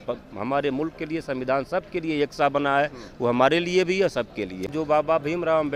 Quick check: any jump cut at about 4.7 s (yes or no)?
yes